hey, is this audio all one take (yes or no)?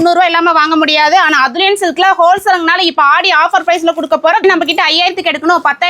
no